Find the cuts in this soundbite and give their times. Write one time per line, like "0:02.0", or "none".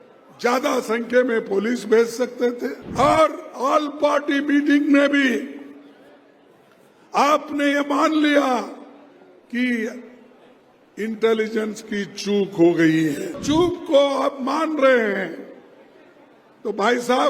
0:02.8
0:13.4